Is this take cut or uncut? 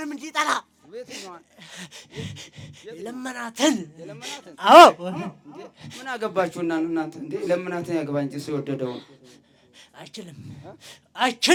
uncut